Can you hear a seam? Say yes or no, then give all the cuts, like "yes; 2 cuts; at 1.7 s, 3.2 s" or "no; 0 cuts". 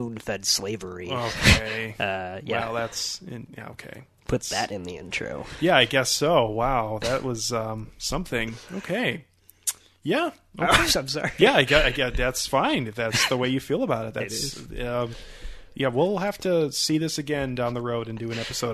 no; 0 cuts